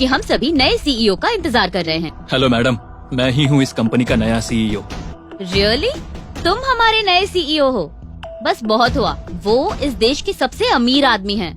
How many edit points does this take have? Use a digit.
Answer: 2